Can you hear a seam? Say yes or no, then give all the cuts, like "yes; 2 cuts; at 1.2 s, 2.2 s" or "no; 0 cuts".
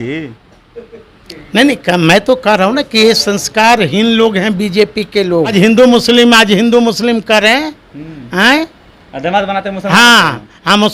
yes; 1 cut; at 5.5 s